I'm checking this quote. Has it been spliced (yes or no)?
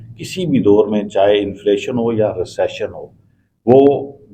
no